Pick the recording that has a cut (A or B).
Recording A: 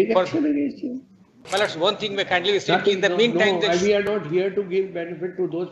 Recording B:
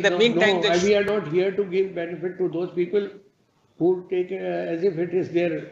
A